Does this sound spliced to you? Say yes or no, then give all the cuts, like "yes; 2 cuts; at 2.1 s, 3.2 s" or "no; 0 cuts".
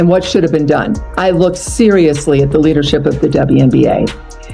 yes; 1 cut; at 1.0 s